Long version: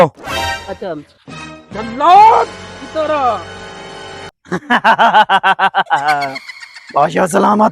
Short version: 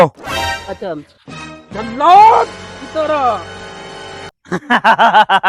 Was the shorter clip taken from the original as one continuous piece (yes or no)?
yes